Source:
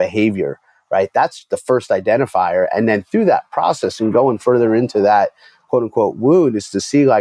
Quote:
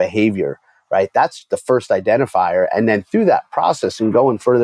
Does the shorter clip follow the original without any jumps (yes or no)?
yes